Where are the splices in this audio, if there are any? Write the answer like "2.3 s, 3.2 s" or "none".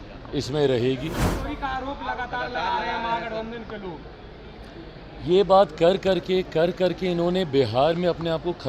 1.3 s